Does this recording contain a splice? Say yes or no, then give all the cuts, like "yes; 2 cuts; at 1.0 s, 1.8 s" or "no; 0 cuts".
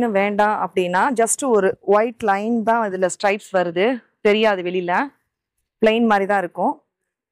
no; 0 cuts